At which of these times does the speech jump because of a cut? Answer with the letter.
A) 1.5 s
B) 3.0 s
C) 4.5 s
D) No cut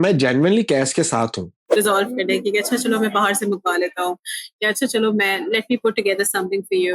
A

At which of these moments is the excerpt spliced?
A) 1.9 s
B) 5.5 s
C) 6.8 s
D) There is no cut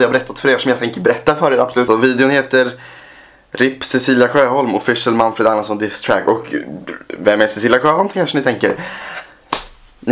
A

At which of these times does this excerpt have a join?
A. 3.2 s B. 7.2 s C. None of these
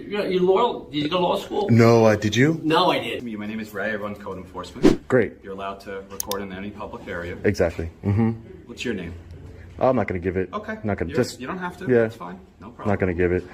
A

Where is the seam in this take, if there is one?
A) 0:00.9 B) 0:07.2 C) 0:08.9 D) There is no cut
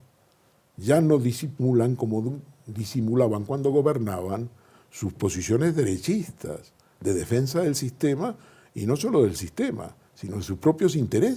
D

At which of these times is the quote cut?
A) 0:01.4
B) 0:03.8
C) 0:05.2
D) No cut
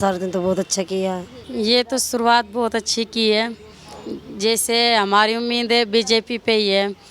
A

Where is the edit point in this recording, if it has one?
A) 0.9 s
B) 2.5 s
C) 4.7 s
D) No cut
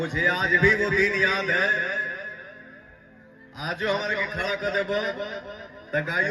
D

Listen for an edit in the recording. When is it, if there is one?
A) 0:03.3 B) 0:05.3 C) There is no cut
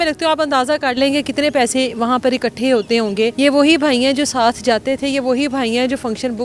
A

